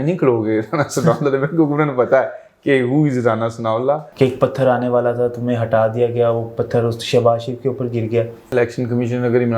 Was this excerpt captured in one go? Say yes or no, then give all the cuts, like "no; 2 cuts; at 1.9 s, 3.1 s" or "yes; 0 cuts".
no; 2 cuts; at 4.1 s, 8.4 s